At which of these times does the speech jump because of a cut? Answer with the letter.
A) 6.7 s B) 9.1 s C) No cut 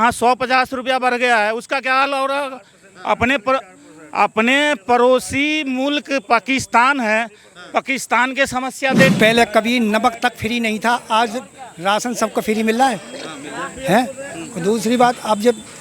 B